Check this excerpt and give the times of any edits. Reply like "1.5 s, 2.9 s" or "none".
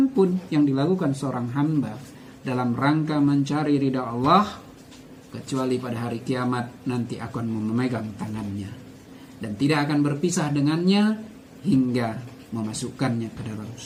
none